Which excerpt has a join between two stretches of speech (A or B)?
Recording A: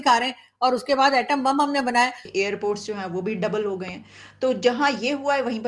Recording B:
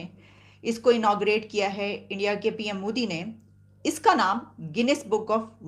A